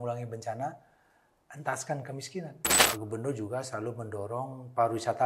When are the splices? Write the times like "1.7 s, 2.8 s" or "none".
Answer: 2.8 s

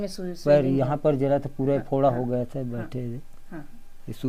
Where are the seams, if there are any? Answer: none

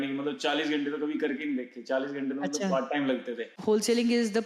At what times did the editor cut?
3.5 s

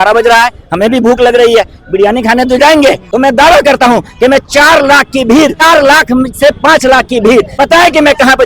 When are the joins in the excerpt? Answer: 3.0 s, 5.6 s, 7.5 s

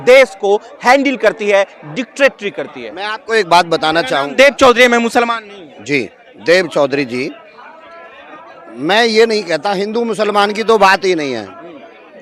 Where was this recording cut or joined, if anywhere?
none

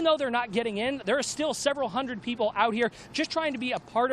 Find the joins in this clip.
none

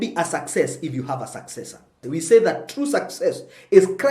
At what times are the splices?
1.9 s

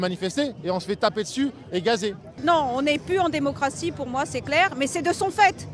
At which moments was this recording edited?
2.4 s

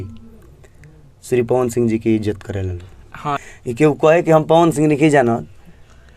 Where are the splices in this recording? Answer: 3.4 s

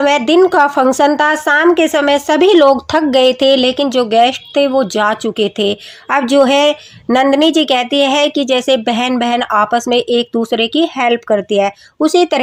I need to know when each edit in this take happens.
none

